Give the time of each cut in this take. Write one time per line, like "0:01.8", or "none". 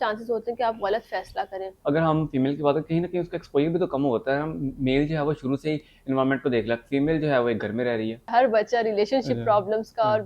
0:01.7
0:08.2